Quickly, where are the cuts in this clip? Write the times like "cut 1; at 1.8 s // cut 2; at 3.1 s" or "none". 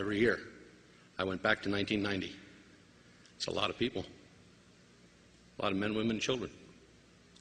none